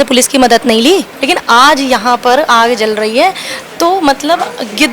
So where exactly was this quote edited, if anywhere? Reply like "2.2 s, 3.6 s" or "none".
1.1 s

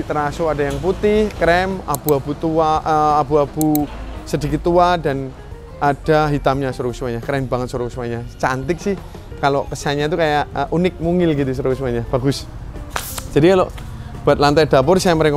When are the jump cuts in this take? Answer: none

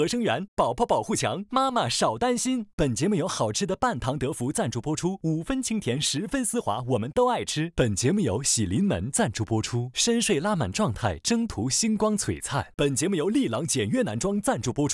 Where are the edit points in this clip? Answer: 12.7 s

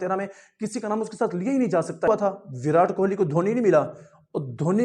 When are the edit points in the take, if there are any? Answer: 2.1 s

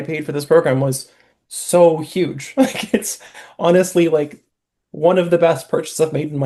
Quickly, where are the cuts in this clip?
none

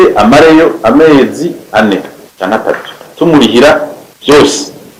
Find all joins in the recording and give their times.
none

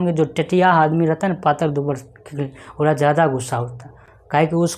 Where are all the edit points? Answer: none

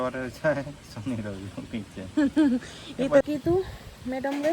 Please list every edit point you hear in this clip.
3.2 s

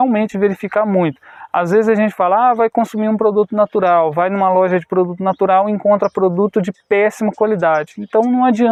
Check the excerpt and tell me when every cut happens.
none

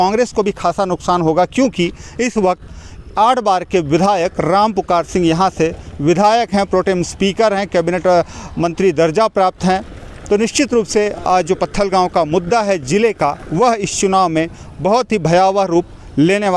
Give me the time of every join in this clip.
none

